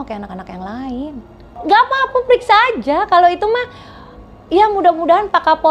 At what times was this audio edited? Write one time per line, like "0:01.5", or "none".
0:01.5